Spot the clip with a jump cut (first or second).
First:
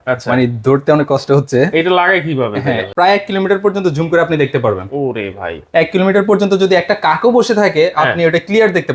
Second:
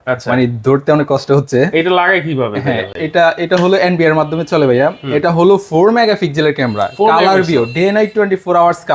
first